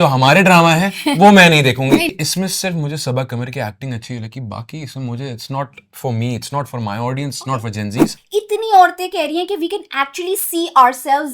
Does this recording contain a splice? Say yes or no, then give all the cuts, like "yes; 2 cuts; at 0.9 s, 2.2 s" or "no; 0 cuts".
yes; 2 cuts; at 2.1 s, 8.2 s